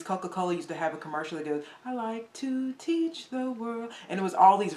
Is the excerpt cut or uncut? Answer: uncut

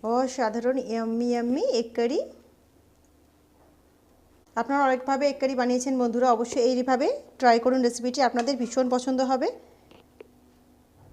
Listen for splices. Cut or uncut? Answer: cut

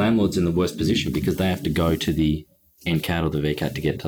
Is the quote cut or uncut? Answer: uncut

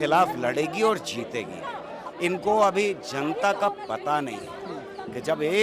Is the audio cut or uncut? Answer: cut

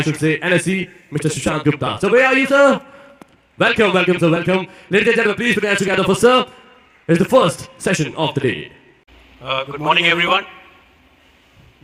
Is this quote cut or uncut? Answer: uncut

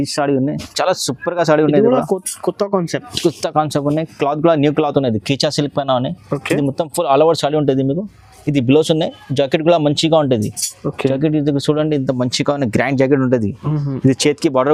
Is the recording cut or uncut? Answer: uncut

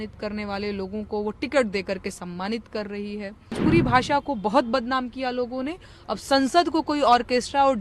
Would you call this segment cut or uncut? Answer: cut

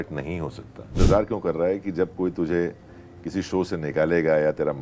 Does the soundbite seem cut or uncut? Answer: cut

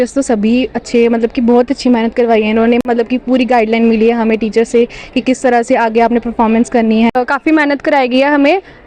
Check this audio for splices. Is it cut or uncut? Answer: cut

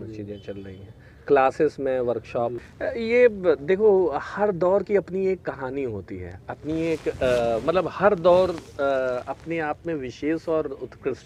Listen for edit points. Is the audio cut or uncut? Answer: cut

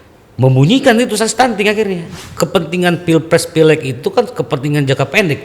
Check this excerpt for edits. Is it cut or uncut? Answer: cut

